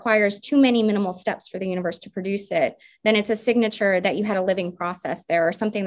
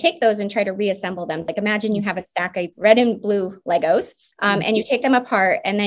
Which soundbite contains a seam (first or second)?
second